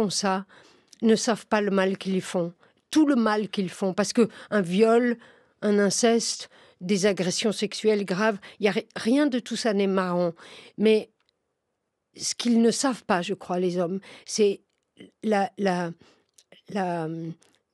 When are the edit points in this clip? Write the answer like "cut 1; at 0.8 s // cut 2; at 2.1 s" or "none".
none